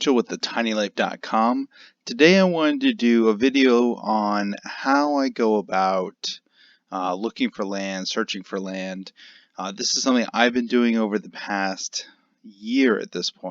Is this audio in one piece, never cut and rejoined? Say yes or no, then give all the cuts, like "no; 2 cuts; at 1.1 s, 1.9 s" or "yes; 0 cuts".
no; 1 cut; at 1.4 s